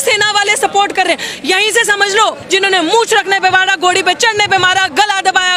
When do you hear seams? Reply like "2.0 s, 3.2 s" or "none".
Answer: 2.4 s

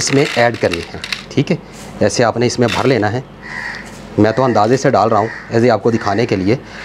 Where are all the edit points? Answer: none

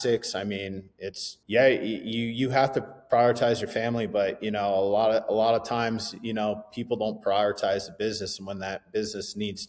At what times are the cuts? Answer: 1.3 s

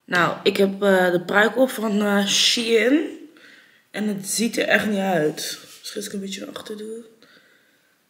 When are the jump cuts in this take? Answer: none

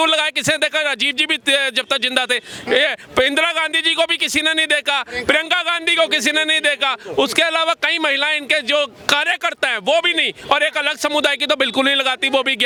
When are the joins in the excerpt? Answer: none

